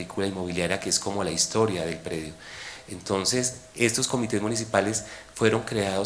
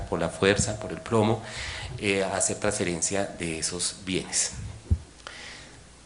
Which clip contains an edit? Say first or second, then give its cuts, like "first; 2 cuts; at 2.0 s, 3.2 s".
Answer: second; 1 cut; at 4.8 s